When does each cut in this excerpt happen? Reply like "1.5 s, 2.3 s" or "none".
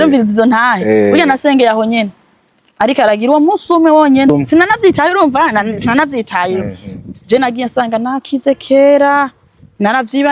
4.3 s